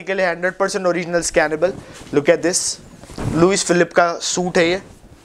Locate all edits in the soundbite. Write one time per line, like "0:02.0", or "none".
none